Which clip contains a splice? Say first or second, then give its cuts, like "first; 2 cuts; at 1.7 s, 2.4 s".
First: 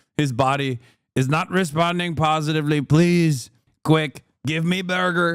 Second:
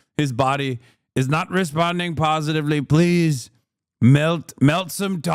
first; 1 cut; at 3.7 s